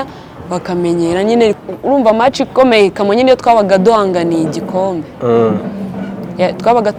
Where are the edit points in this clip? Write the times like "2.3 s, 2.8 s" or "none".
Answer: none